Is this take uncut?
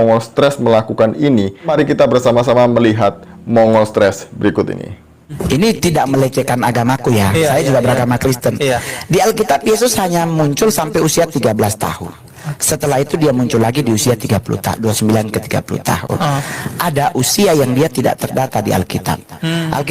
no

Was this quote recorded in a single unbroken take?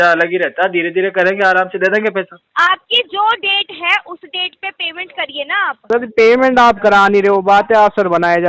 no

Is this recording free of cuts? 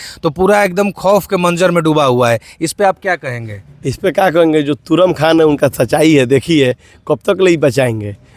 yes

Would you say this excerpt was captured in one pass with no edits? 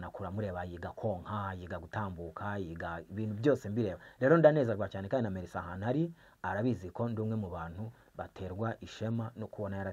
yes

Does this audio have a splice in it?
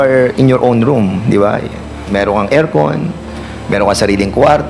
no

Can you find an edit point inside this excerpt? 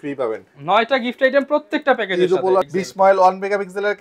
yes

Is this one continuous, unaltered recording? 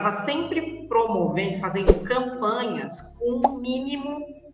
yes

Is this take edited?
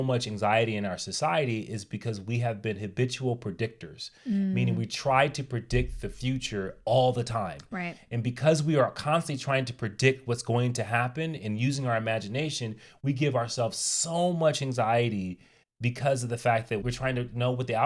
yes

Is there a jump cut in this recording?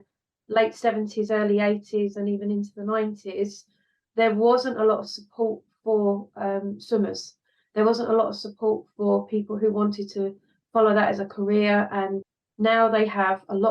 yes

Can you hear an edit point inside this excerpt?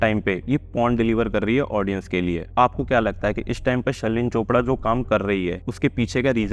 yes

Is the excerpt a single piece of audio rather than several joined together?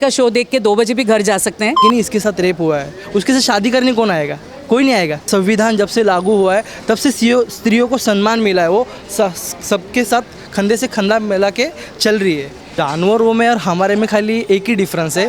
no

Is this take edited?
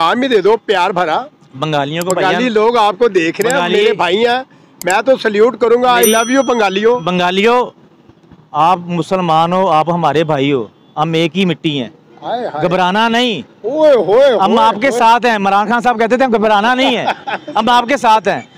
no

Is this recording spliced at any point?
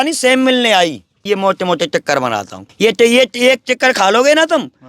yes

